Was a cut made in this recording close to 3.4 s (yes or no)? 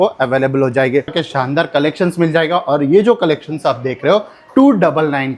no